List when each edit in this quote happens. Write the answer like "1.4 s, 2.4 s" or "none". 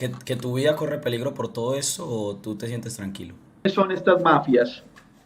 3.6 s